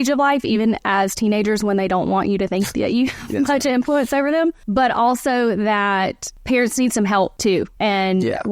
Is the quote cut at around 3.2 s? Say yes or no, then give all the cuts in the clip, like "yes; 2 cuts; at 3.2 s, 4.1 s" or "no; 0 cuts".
no; 3 cuts; at 4.6 s, 6.3 s, 7.5 s